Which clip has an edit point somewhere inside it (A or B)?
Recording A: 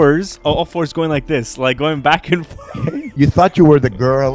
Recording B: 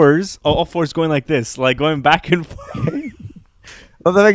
A